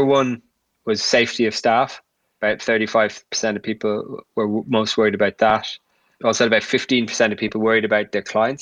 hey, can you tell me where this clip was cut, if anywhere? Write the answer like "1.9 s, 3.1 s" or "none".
2.3 s, 6.1 s